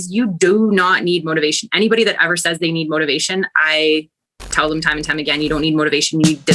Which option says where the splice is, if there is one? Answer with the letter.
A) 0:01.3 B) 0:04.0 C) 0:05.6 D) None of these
D